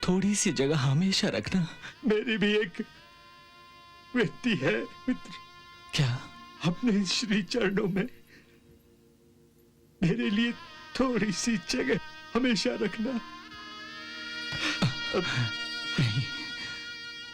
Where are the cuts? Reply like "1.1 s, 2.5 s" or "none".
1.8 s, 6.4 s